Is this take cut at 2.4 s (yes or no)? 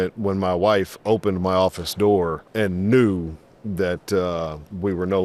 yes